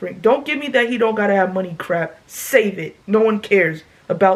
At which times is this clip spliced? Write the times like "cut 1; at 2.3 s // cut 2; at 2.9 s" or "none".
none